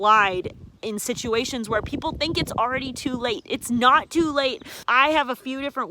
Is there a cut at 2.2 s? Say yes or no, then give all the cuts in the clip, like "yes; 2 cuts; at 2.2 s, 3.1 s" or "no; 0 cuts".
no; 1 cut; at 4.8 s